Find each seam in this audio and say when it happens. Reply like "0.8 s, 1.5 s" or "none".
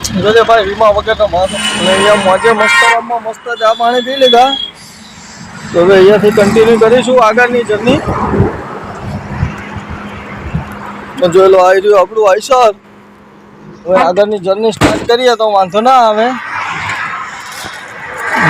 1.6 s, 13.9 s